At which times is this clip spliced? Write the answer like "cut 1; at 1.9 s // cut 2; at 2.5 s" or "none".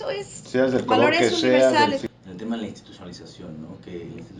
cut 1; at 2.0 s

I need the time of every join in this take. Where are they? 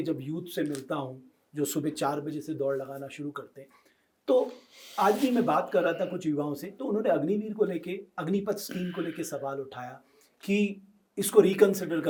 none

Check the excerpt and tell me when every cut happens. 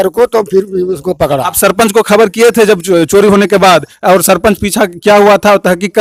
none

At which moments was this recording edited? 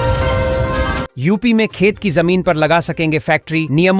cut 1; at 0.9 s

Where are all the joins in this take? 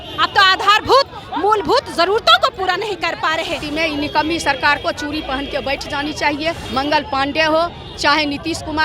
cut 1; at 3.6 s // cut 2; at 6.6 s

